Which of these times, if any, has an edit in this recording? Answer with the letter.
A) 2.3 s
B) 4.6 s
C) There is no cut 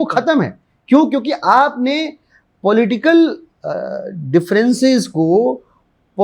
C